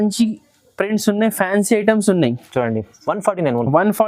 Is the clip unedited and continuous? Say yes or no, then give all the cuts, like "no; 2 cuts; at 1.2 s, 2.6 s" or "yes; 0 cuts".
yes; 0 cuts